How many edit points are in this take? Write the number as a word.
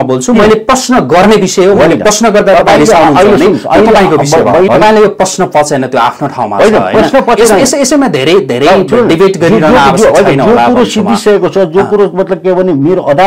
one